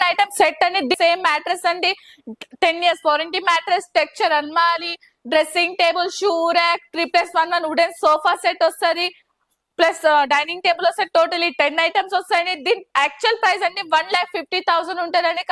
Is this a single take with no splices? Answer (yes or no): no